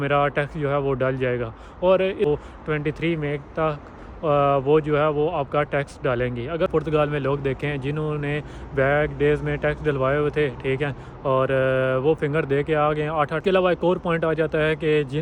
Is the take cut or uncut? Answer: cut